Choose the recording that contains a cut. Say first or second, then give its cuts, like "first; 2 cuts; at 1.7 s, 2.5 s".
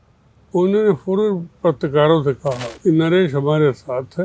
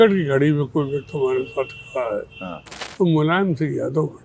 first; 1 cut; at 2.7 s